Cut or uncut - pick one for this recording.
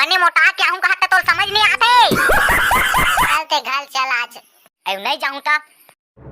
cut